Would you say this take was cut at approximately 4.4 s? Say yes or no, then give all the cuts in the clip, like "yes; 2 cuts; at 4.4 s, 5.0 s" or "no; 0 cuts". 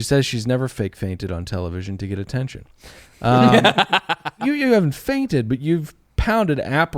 yes; 1 cut; at 4.4 s